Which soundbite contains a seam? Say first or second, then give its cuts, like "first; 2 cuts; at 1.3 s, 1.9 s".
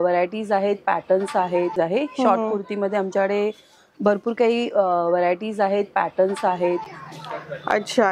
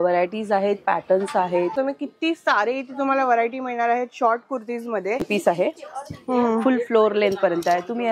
second; 2 cuts; at 1.7 s, 5.3 s